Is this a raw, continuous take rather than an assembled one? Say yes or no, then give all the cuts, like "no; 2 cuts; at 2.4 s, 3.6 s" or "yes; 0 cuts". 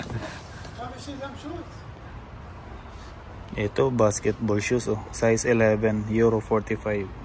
no; 1 cut; at 2.1 s